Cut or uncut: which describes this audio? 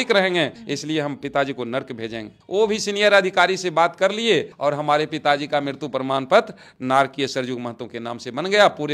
uncut